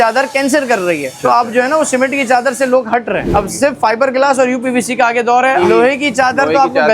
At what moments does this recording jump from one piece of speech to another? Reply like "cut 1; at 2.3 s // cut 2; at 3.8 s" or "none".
cut 1; at 1.1 s // cut 2; at 3.3 s // cut 3; at 5.6 s